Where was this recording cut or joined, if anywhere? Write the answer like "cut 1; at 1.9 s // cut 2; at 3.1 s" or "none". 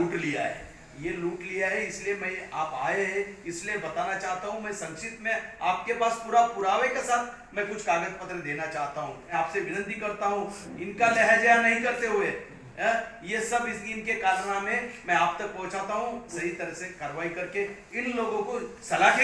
cut 1; at 9.3 s // cut 2; at 16.3 s